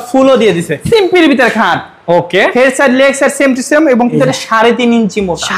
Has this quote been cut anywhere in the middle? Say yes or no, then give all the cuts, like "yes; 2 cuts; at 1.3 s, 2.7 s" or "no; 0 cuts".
yes; 2 cuts; at 0.8 s, 4.1 s